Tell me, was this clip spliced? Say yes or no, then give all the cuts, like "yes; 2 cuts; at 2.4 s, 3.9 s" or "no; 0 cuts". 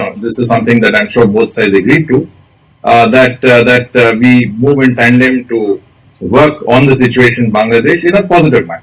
no; 0 cuts